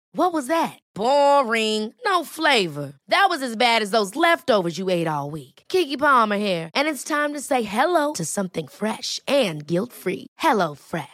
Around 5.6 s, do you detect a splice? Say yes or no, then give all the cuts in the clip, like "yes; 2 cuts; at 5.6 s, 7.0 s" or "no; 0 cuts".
no; 0 cuts